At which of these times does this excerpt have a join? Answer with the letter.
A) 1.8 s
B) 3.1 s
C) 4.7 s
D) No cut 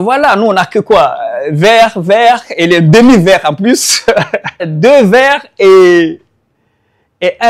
C